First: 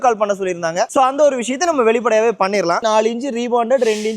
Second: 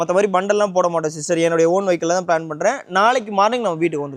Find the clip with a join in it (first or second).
first